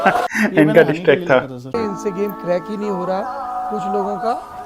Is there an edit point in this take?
yes; 1 cut; at 1.6 s

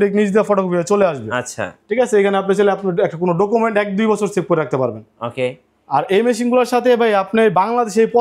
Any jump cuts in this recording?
no; 0 cuts

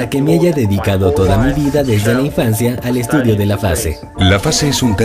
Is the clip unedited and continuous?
no; 1 cut; at 1.3 s

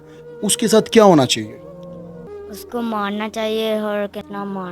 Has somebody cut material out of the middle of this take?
no; 0 cuts

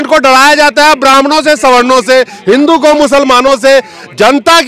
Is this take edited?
no; 0 cuts

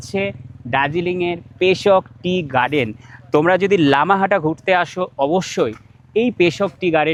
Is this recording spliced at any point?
no; 0 cuts

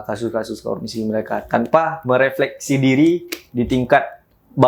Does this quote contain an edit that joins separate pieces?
no; 0 cuts

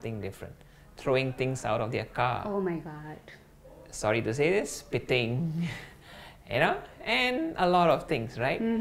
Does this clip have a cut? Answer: no; 0 cuts

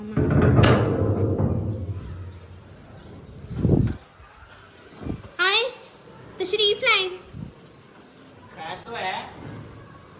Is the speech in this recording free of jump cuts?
yes; 0 cuts

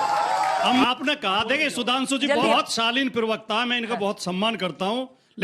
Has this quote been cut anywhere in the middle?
yes; 2 cuts; at 0.8 s, 2.5 s

